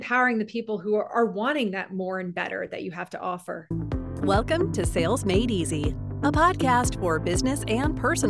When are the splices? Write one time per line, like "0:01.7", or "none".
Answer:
0:04.1